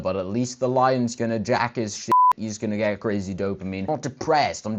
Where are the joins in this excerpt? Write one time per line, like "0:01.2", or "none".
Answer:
0:03.8